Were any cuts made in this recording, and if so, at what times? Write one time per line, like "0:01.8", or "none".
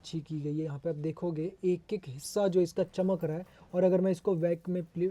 none